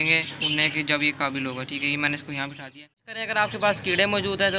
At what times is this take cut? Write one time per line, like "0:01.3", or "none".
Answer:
0:03.3